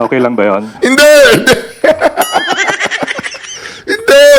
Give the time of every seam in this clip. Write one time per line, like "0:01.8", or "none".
none